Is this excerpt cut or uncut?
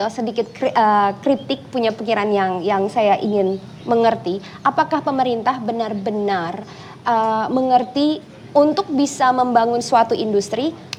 uncut